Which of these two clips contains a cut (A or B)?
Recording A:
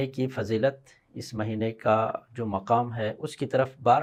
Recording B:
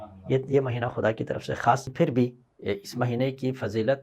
B